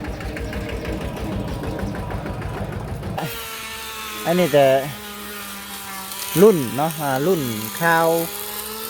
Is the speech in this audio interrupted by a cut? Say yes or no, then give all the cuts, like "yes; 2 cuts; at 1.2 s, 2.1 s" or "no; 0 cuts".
yes; 1 cut; at 3.3 s